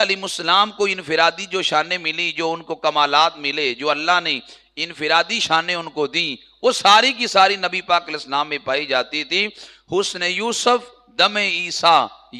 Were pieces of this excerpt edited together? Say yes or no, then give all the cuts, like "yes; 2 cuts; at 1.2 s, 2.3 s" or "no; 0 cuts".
no; 0 cuts